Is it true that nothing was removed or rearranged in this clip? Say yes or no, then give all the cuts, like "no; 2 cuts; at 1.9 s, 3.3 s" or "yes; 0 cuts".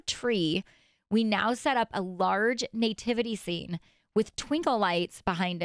yes; 0 cuts